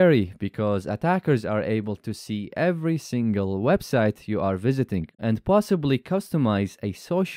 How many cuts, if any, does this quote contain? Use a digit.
1